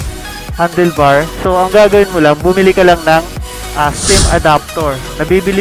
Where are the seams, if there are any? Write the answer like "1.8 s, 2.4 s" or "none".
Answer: none